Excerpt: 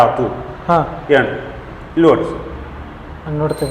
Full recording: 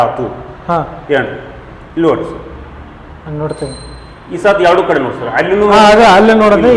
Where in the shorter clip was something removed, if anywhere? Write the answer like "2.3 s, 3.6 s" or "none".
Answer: none